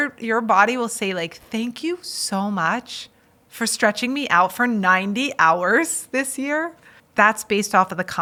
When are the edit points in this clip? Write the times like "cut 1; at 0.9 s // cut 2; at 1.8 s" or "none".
none